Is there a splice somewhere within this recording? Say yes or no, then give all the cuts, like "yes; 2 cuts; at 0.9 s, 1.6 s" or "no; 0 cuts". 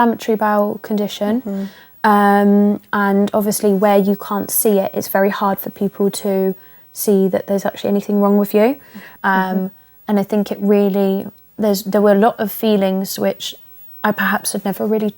yes; 1 cut; at 9.0 s